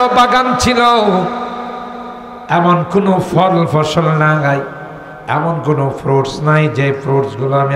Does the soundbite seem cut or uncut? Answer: uncut